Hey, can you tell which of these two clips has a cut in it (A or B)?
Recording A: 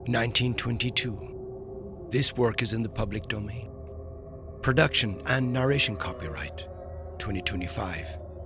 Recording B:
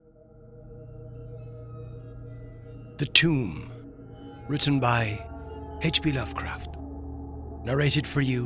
B